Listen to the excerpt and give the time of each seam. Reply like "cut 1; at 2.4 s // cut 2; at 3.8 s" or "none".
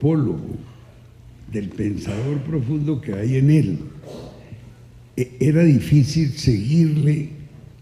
none